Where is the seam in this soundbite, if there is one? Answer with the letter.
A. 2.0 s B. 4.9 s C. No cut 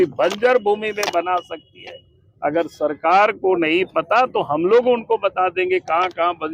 C